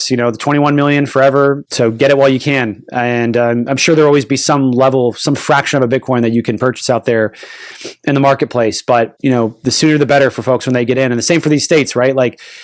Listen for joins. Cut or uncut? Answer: uncut